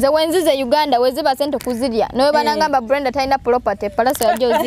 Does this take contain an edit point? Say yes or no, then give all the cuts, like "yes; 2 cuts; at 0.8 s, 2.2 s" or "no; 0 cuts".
no; 0 cuts